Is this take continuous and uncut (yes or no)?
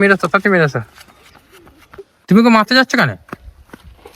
no